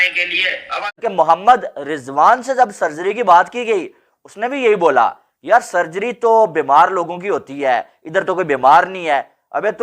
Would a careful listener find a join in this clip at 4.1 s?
no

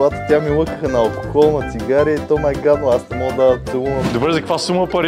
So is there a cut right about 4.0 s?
yes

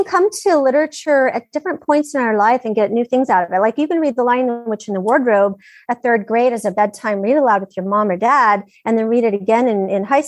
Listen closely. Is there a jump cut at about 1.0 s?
yes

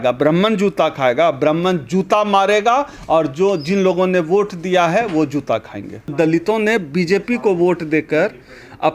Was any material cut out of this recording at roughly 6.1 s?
yes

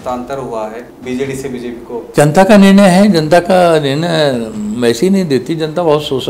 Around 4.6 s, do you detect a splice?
no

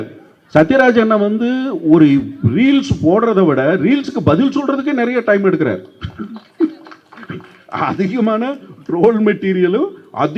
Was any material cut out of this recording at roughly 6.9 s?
no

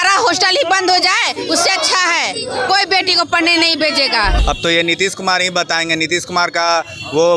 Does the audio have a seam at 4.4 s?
yes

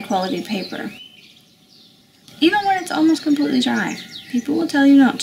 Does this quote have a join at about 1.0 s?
no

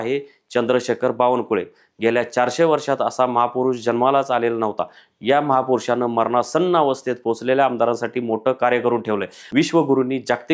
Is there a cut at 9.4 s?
yes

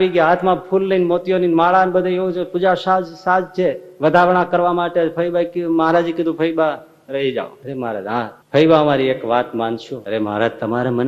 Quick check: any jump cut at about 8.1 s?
yes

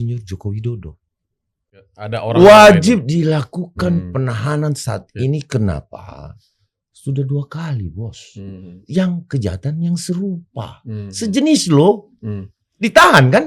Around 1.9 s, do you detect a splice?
yes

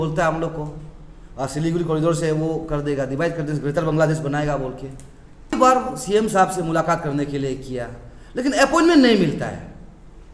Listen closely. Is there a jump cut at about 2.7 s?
no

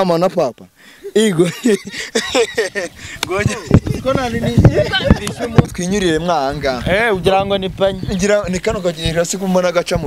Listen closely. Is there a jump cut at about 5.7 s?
yes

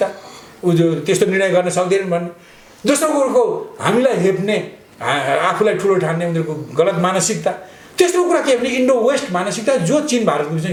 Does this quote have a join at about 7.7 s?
no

